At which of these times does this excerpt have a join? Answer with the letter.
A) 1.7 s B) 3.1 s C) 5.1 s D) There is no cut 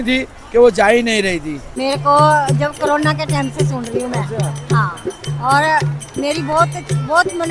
A